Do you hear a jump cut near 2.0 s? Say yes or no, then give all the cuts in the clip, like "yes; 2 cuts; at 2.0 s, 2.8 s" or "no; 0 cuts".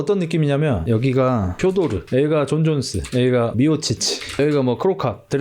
yes; 2 cuts; at 2.0 s, 4.3 s